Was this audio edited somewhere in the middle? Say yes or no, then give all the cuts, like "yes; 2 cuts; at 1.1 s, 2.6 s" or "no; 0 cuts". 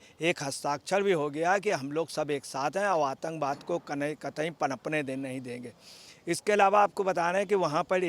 no; 0 cuts